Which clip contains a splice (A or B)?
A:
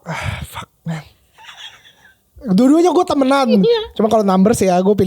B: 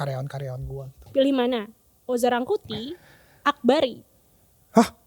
B